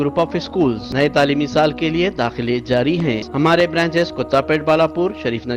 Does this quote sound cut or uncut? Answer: cut